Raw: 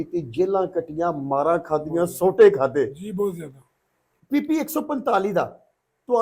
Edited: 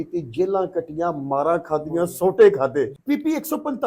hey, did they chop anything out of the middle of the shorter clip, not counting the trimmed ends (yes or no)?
yes